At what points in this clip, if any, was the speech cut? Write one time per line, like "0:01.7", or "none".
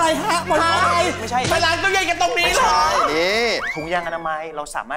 none